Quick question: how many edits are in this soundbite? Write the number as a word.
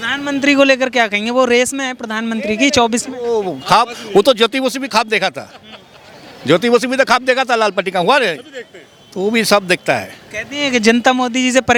zero